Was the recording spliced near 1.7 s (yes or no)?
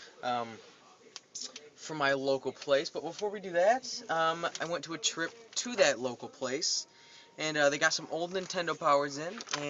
no